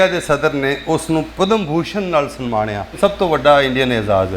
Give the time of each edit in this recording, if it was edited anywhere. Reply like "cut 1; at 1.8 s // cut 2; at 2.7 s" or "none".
cut 1; at 1.3 s // cut 2; at 3.0 s